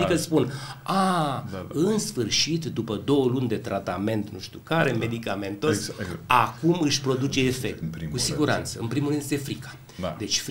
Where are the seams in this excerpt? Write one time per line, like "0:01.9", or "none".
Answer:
0:07.9